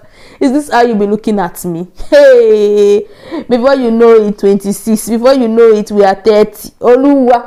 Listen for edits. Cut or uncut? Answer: uncut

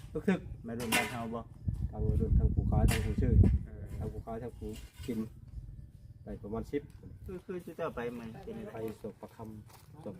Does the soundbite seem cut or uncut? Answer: cut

